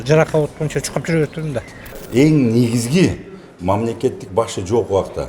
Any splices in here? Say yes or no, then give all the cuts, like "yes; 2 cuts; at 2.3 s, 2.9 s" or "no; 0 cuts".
yes; 1 cut; at 1.9 s